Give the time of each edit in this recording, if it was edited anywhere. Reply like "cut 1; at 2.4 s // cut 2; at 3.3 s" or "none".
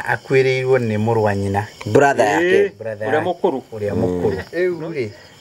cut 1; at 4.5 s